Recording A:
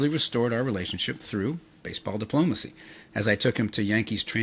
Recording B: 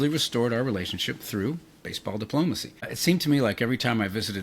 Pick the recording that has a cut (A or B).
B